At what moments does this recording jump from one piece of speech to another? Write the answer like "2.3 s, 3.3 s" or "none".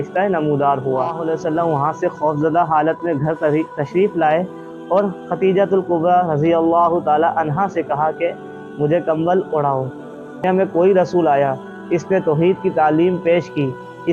1.2 s, 10.4 s